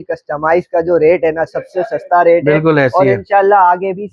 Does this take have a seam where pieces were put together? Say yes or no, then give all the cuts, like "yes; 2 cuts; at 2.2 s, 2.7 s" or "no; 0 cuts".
no; 0 cuts